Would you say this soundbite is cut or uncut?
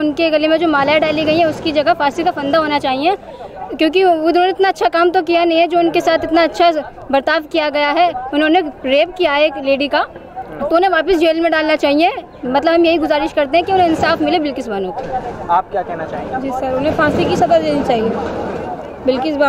uncut